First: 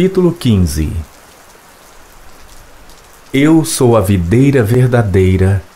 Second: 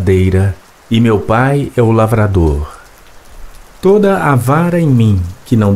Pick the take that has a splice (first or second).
first